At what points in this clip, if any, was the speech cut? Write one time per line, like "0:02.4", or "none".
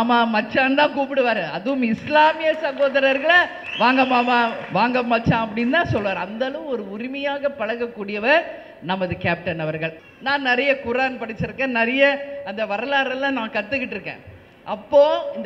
0:10.0